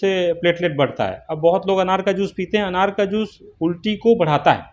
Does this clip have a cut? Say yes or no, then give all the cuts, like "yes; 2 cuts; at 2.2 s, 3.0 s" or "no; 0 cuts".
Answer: no; 0 cuts